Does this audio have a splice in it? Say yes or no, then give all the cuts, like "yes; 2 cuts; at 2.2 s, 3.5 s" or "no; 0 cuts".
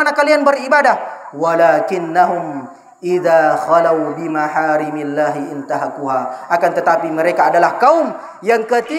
no; 0 cuts